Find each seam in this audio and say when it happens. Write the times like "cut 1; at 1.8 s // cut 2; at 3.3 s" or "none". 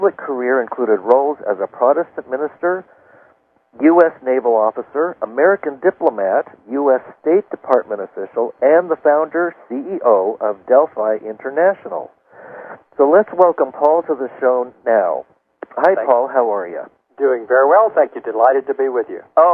none